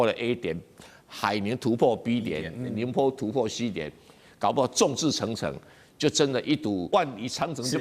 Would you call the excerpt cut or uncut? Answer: cut